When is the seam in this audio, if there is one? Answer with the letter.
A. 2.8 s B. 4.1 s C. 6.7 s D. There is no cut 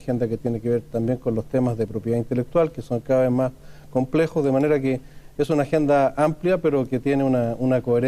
C